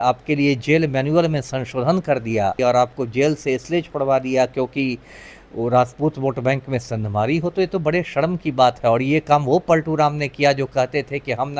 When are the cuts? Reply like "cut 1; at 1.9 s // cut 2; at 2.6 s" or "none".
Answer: cut 1; at 2.6 s